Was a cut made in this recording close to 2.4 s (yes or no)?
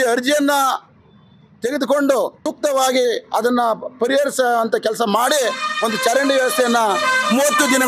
yes